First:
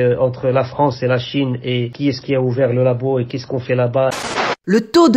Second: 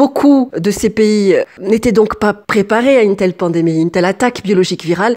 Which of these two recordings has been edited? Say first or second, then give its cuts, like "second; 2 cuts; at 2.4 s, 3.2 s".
first; 3 cuts; at 1.9 s, 3.4 s, 4.1 s